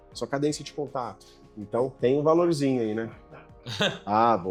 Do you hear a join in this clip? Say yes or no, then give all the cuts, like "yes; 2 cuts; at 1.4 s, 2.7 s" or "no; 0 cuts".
no; 0 cuts